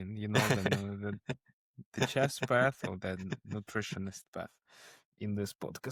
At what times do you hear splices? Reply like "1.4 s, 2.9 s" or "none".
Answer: none